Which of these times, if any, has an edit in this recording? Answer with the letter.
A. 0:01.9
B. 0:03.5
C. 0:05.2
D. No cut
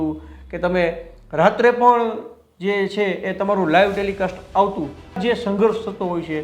C